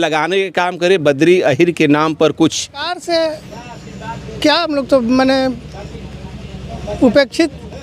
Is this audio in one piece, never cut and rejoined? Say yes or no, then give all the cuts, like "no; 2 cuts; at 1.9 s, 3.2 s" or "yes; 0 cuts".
no; 1 cut; at 2.9 s